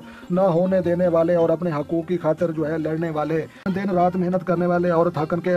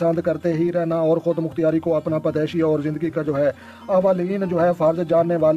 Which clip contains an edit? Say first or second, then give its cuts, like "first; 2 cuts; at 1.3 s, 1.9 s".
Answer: first; 1 cut; at 3.7 s